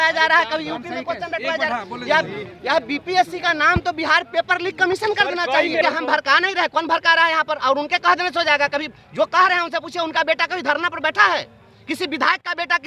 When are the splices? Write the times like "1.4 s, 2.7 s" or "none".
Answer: 5.8 s